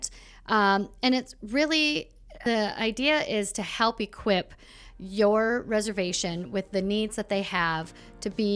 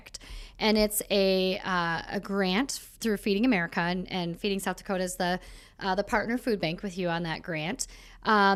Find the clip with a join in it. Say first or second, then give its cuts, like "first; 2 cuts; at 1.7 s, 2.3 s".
first; 1 cut; at 2.3 s